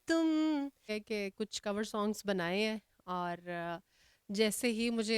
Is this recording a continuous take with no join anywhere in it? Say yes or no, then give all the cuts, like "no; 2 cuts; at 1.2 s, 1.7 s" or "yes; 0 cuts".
no; 1 cut; at 1.0 s